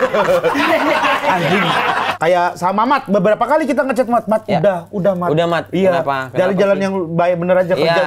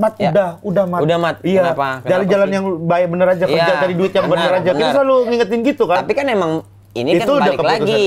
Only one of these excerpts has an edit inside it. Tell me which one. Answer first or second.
first